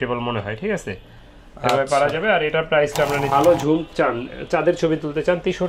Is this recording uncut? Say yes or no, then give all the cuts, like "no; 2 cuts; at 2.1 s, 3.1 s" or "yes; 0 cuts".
no; 1 cut; at 3.3 s